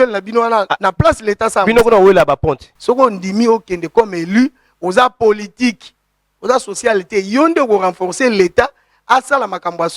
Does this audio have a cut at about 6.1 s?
no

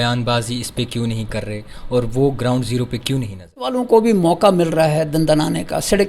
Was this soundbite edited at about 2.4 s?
no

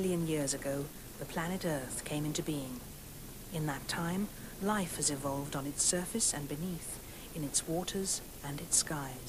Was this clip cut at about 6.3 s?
yes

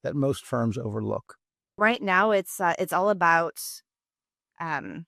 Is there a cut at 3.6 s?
no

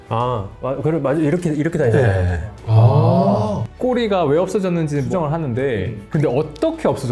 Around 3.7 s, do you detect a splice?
yes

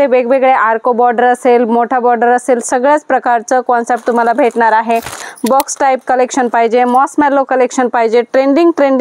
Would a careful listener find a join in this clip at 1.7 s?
no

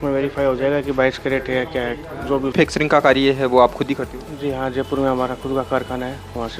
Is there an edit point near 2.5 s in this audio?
yes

